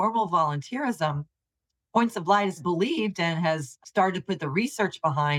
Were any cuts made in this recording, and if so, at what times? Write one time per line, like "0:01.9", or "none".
0:02.6
0:03.7